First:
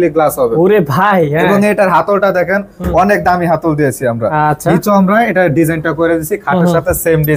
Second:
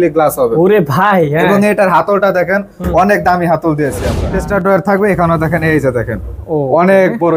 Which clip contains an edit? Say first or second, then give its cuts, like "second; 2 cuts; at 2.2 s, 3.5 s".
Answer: second; 1 cut; at 4.1 s